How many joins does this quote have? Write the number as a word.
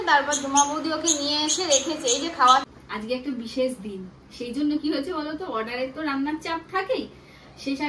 one